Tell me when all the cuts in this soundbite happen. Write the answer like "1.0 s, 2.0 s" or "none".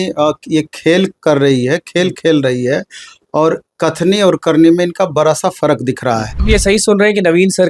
6.4 s